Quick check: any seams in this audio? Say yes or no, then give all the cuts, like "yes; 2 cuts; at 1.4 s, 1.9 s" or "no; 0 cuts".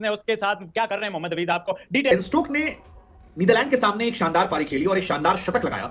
yes; 1 cut; at 2.1 s